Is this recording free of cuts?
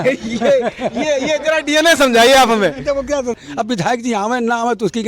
no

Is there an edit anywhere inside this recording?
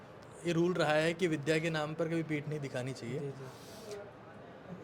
no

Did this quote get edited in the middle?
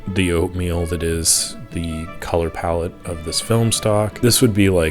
no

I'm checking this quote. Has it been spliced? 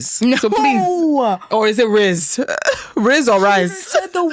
no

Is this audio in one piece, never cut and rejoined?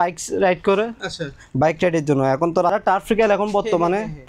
no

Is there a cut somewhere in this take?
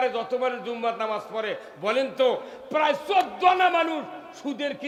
no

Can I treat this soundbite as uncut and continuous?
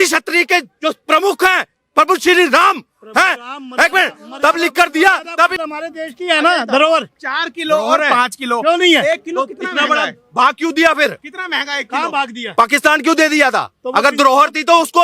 no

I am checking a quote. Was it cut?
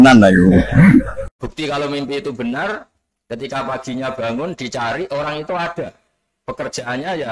yes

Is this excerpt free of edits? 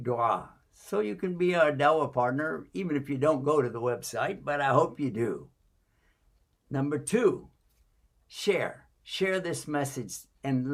yes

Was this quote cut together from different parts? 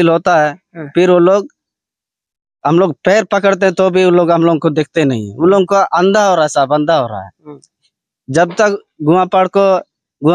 no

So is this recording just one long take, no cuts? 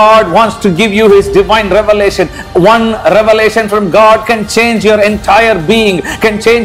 yes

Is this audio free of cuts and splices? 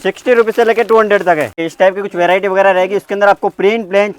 no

